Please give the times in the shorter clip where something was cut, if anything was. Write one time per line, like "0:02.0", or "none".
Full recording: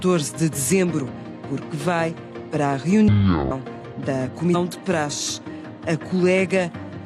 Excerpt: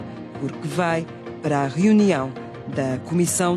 none